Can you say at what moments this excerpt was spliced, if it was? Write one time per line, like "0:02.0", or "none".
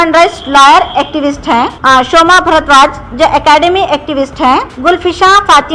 0:01.8
0:04.7